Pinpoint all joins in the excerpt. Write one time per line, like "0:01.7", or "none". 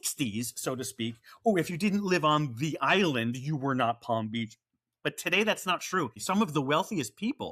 none